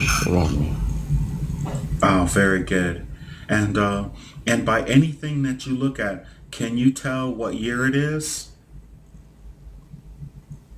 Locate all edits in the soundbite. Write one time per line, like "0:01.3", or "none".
none